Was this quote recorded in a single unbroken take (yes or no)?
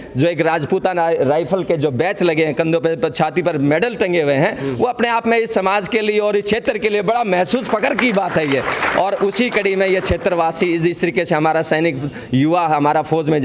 yes